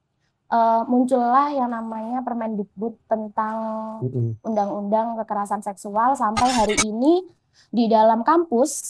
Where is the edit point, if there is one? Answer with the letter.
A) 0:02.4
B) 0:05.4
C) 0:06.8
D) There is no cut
D